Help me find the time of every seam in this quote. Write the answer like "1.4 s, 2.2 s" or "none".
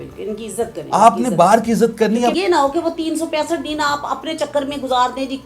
2.3 s

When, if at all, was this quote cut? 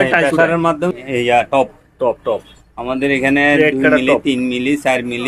0.9 s

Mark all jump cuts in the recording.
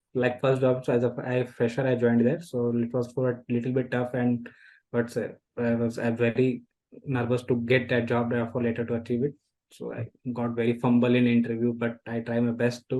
none

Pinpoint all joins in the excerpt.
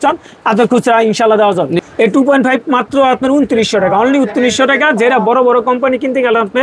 1.8 s

